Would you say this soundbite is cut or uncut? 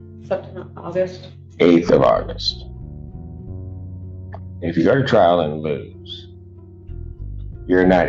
uncut